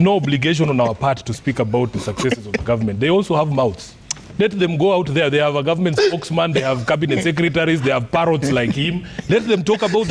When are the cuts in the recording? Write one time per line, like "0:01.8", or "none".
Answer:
none